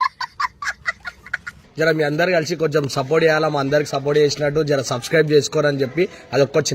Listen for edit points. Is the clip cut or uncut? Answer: cut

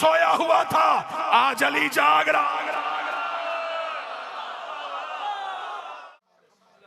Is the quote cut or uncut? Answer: cut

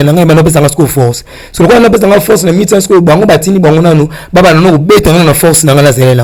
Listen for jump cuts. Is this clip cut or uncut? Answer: uncut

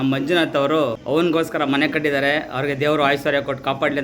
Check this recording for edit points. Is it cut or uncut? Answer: cut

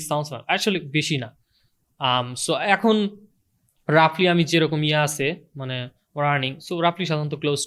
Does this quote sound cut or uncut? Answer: uncut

